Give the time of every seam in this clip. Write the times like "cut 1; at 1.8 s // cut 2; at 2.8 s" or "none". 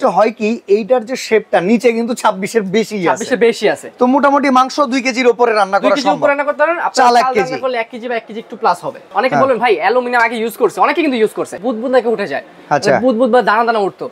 cut 1; at 9.1 s // cut 2; at 11.5 s